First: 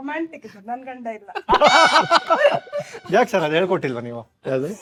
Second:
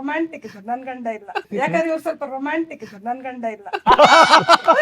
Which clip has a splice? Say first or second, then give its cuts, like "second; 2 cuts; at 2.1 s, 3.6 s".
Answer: second; 2 cuts; at 1.4 s, 3.8 s